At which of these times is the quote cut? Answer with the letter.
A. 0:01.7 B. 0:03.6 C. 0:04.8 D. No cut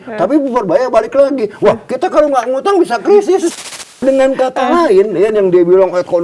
B